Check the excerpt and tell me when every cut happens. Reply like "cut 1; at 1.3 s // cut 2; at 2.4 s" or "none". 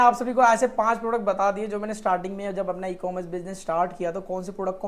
none